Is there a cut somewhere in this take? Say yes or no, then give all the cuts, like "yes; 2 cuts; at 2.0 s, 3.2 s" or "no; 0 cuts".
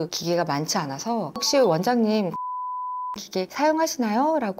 no; 0 cuts